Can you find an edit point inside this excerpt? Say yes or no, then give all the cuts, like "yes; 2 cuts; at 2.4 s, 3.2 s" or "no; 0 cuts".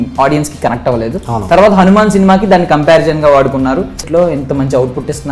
yes; 1 cut; at 4.0 s